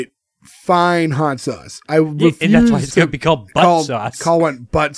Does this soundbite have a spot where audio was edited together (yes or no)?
no